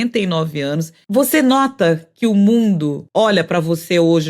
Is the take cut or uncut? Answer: cut